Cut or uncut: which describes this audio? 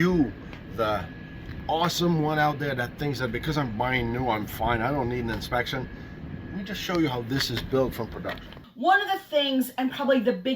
cut